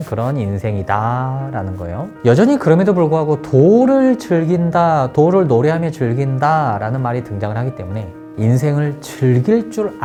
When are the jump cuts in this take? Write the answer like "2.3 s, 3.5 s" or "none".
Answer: none